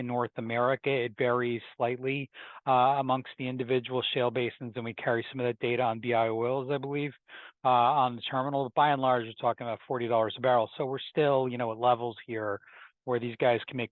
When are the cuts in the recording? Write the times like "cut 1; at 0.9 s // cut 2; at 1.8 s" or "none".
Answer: none